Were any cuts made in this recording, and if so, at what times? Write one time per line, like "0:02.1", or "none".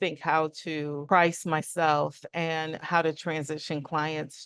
0:01.0
0:02.8